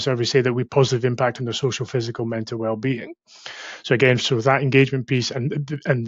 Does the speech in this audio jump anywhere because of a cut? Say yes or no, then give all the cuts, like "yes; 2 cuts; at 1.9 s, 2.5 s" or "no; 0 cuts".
no; 0 cuts